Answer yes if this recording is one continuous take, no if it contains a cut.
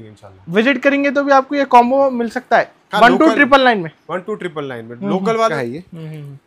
no